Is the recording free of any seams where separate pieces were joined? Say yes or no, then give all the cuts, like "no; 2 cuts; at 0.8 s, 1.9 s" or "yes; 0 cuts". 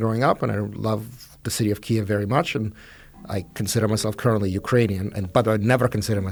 yes; 0 cuts